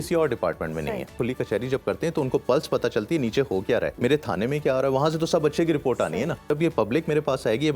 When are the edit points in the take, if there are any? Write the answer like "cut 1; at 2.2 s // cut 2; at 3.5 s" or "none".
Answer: cut 1; at 1.1 s // cut 2; at 3.9 s // cut 3; at 6.5 s